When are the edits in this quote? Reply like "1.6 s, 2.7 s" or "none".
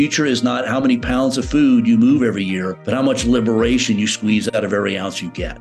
2.7 s